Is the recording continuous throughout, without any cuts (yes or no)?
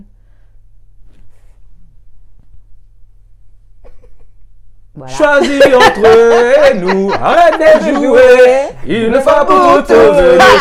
yes